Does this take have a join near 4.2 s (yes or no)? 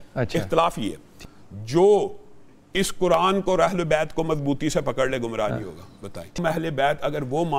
no